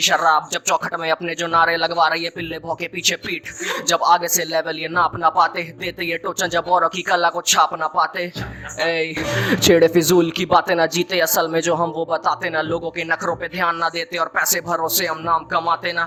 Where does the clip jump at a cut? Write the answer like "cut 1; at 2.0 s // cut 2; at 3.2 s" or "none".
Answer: none